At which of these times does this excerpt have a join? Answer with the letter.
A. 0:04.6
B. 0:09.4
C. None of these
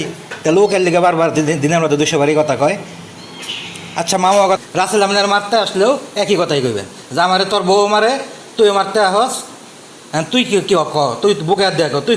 A